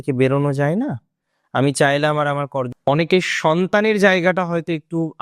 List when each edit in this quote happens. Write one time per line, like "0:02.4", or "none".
0:02.7